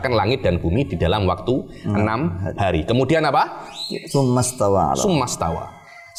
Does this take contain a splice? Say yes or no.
no